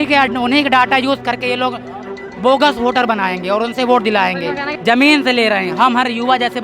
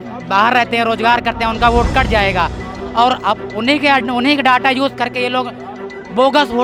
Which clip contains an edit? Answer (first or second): first